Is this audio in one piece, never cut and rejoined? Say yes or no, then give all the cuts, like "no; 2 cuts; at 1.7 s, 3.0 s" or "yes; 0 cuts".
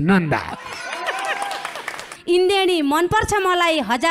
no; 1 cut; at 2.0 s